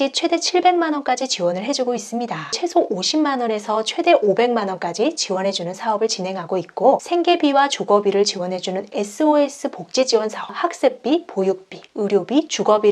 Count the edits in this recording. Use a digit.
3